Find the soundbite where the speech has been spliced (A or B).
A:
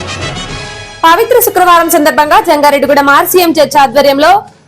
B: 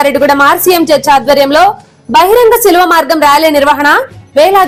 A